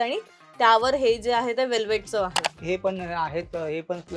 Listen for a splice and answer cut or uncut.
cut